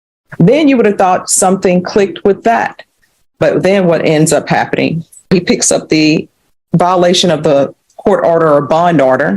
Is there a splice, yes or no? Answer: yes